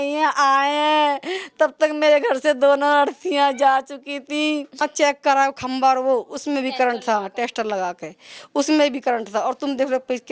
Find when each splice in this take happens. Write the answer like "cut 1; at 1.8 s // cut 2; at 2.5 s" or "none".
cut 1; at 4.9 s